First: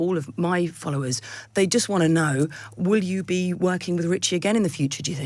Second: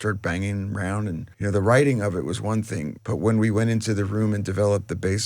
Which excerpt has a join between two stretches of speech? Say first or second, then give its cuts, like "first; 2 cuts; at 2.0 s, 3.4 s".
second; 2 cuts; at 1.3 s, 2.9 s